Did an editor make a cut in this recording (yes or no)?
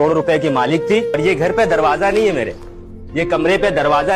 yes